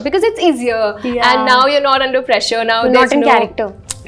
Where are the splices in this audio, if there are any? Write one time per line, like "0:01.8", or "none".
none

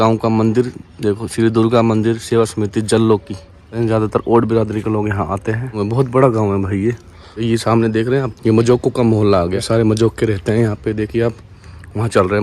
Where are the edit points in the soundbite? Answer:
none

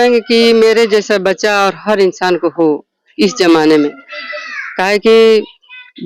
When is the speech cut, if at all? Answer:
none

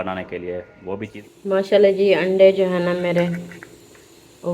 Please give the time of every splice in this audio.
0:01.2

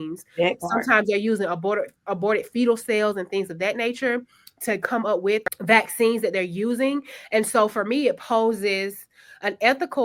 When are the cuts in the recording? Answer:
0:05.5

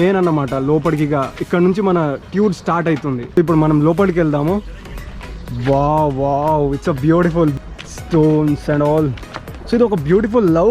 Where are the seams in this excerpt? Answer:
0:03.4
0:07.5

